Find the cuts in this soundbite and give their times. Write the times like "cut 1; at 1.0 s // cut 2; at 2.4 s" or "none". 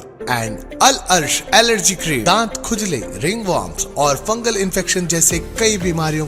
cut 1; at 2.2 s